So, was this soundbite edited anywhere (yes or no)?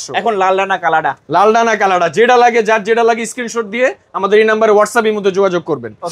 no